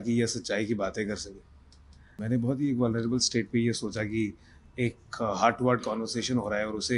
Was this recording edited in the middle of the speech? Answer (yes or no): yes